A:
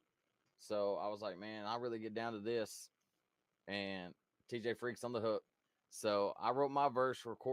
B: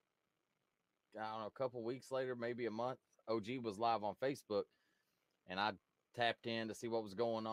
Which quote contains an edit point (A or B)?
A